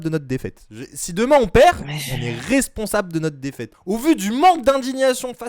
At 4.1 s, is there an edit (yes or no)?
no